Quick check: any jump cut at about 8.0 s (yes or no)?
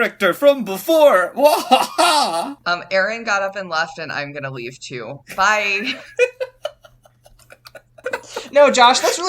yes